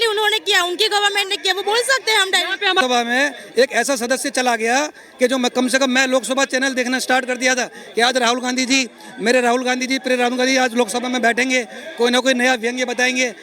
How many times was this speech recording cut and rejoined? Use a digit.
1